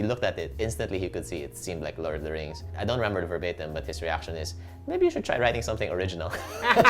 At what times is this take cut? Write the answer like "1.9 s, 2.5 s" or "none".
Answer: 2.7 s